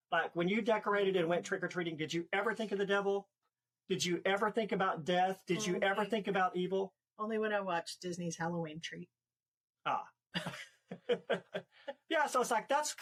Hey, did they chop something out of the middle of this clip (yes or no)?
no